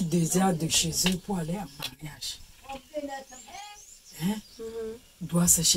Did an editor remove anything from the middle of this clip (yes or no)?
no